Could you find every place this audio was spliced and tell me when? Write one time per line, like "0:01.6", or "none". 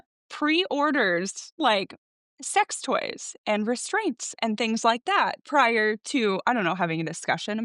none